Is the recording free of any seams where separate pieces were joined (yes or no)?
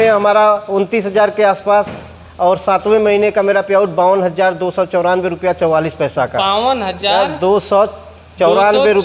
yes